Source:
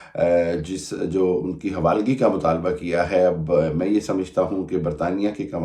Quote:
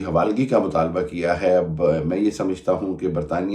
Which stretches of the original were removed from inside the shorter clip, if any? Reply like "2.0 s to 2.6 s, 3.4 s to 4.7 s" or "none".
none